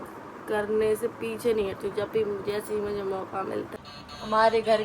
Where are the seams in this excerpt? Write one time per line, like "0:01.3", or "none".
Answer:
0:03.7